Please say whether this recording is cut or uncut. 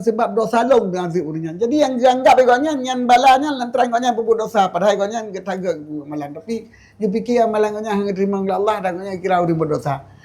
uncut